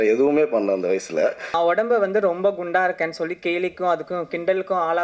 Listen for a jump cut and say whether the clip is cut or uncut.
cut